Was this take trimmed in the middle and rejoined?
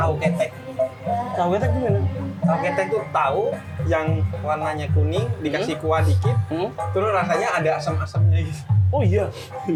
no; 0 cuts

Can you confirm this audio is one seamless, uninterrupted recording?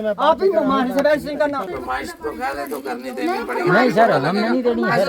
no; 1 cut; at 1.6 s

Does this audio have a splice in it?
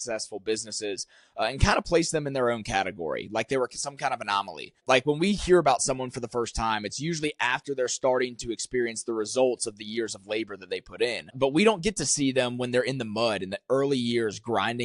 yes; 2 cuts; at 4.8 s, 11.3 s

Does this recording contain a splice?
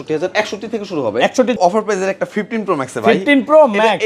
yes; 1 cut; at 1.6 s

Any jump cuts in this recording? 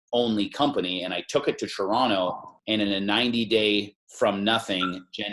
yes; 2 cuts; at 2.5 s, 4.0 s

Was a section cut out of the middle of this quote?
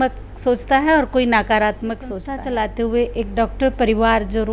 yes; 1 cut; at 2.3 s

